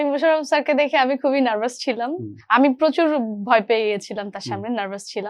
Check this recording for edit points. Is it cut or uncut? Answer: cut